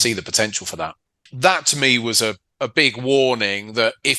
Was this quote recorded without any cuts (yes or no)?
no